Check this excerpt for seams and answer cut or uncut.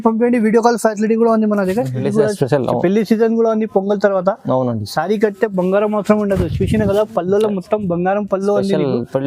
cut